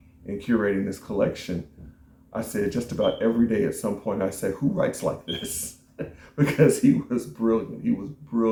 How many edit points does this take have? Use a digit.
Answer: 0